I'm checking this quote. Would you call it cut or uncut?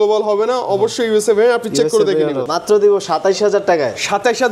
cut